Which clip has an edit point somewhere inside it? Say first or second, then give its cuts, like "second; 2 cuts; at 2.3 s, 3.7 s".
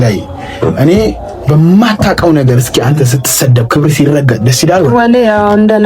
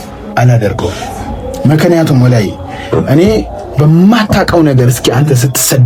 first; 1 cut; at 4.9 s